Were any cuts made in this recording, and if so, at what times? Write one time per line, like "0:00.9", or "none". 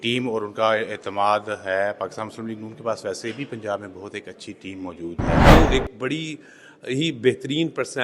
0:05.2
0:05.7